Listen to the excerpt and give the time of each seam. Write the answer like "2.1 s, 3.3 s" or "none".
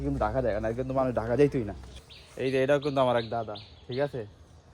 1.8 s